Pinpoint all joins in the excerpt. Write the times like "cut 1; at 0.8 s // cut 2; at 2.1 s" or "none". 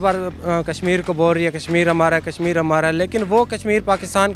none